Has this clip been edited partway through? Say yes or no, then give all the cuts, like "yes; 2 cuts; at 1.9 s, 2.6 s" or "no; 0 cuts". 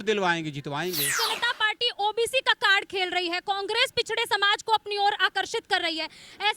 yes; 1 cut; at 1.2 s